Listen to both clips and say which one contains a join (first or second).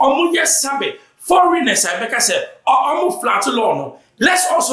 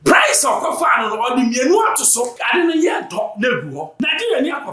second